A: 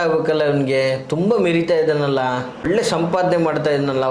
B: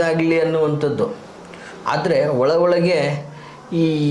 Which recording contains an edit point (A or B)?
A